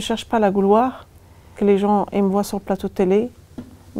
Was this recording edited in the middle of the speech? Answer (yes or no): yes